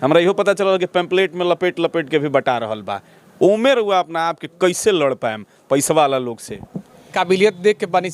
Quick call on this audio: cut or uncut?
cut